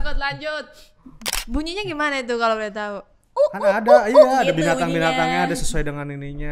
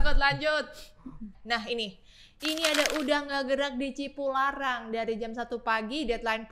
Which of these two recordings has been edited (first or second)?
first